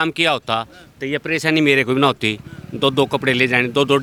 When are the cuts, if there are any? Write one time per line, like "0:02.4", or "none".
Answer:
none

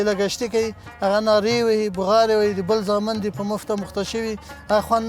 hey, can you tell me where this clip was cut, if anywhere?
none

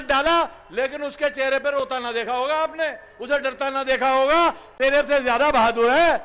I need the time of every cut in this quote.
none

